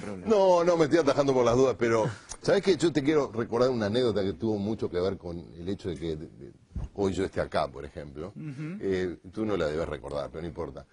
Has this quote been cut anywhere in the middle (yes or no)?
no